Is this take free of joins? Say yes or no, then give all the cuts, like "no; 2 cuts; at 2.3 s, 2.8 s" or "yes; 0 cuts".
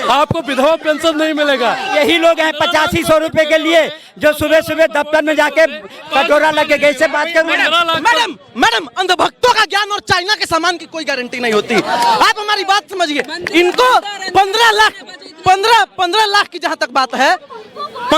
no; 1 cut; at 1.9 s